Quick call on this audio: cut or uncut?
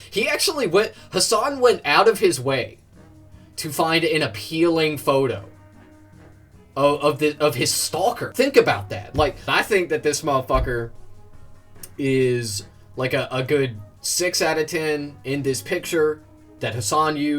cut